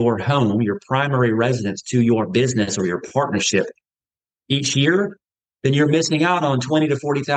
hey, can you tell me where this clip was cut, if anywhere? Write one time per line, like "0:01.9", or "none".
none